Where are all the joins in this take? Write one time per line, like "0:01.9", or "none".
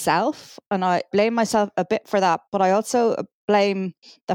0:01.1